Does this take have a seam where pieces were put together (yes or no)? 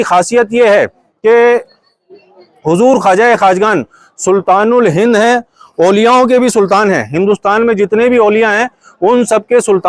no